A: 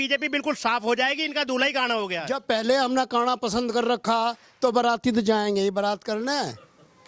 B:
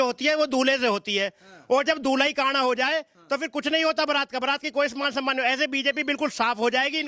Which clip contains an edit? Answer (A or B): A